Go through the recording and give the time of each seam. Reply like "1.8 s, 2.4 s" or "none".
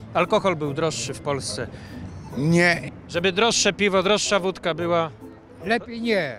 2.9 s